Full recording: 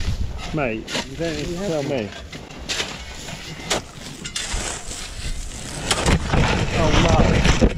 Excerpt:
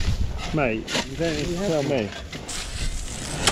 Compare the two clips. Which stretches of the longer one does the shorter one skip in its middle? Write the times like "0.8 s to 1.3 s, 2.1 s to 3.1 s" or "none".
2.5 s to 4.9 s

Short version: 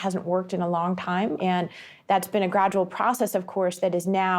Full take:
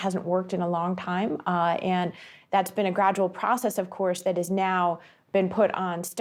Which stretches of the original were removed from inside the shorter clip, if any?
1.4 s to 1.8 s

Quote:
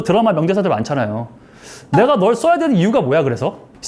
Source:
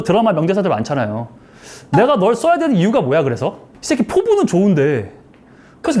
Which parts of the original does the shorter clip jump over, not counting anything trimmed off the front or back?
none

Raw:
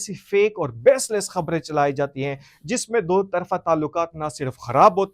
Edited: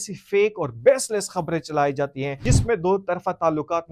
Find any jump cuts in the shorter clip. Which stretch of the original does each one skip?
2.4 s to 2.6 s

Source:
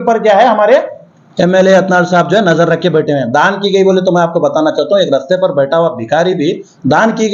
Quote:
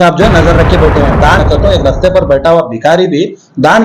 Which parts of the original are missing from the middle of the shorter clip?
3.6 s to 4.7 s

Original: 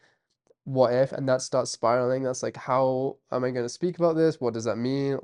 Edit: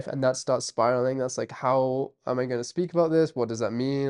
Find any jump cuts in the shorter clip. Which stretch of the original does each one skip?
none

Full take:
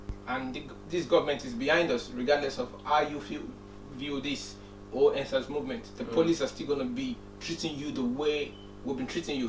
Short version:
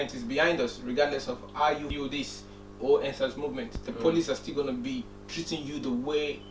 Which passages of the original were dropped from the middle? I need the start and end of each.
3.2 s to 4.0 s

